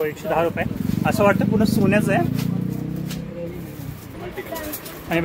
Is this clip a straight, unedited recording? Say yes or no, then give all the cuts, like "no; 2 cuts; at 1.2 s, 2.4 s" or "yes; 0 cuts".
yes; 0 cuts